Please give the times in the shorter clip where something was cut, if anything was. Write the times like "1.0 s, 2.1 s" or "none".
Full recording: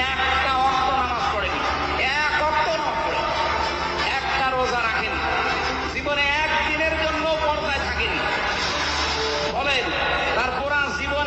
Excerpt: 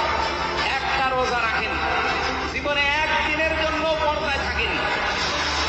none